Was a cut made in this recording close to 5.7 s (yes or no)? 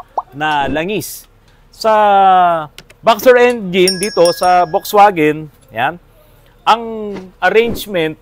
no